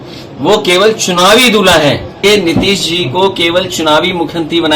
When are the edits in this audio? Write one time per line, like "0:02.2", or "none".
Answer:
0:02.1